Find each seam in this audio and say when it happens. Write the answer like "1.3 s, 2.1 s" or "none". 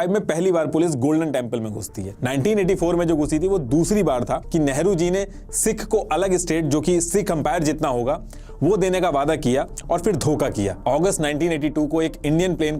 4.4 s, 10.8 s